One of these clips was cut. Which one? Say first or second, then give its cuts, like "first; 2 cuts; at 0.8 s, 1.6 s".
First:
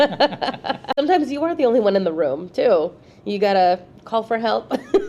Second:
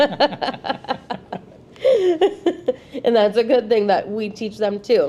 first; 1 cut; at 0.9 s